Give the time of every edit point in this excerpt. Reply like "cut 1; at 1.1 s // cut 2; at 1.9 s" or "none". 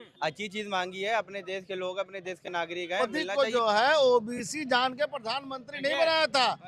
cut 1; at 3.0 s